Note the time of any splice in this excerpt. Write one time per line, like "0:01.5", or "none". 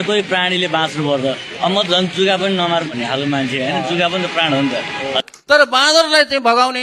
0:05.2